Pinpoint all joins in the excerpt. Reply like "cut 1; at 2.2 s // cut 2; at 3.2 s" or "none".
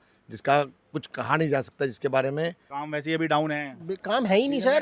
cut 1; at 2.6 s